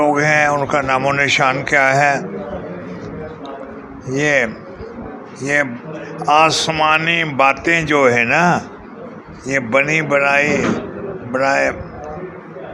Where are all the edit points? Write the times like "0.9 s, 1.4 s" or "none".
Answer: none